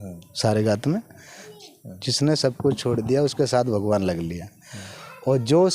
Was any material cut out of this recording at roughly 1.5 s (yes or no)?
yes